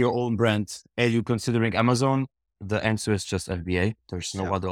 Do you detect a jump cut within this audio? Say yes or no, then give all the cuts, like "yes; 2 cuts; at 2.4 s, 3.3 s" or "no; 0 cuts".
no; 0 cuts